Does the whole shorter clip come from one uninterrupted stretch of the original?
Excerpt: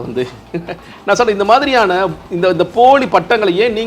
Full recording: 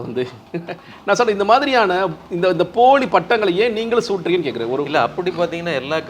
yes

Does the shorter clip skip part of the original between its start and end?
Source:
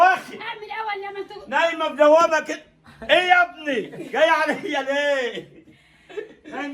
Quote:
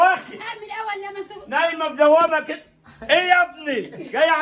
no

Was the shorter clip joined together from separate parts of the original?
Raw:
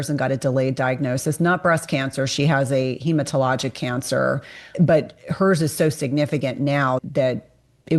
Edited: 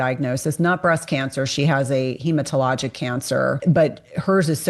yes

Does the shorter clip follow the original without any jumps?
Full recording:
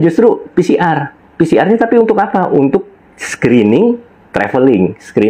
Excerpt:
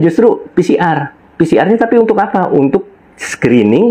yes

